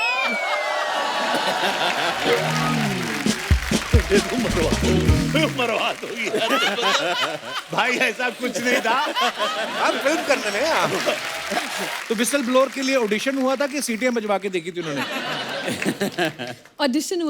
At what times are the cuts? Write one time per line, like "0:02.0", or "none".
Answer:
0:11.9